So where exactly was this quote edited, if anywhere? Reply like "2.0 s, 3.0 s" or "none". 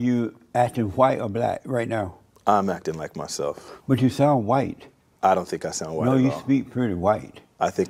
none